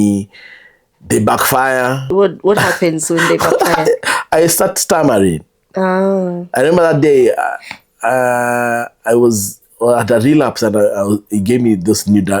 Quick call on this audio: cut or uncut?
cut